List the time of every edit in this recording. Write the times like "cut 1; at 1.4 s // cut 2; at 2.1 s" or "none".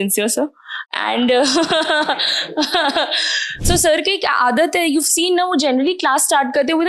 cut 1; at 3.7 s